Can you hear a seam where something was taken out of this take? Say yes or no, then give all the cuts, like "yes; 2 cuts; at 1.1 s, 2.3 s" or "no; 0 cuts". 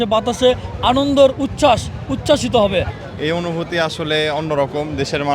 yes; 1 cut; at 2.9 s